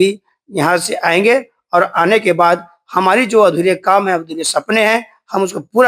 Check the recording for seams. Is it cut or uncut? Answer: uncut